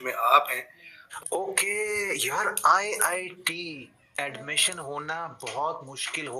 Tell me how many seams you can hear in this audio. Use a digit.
1